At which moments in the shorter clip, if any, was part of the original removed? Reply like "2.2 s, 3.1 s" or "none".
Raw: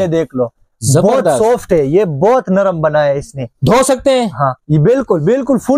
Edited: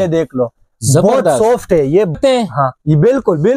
2.2 s